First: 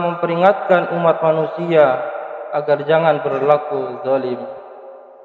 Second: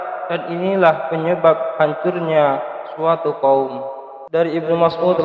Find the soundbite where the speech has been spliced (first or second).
second